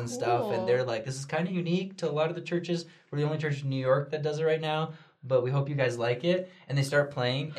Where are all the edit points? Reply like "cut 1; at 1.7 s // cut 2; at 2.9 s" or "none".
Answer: none